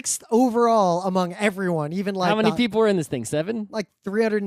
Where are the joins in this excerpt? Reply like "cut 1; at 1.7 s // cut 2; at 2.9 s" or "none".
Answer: none